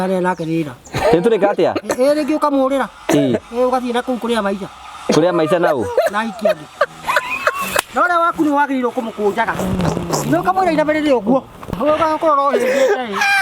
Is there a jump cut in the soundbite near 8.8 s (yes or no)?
no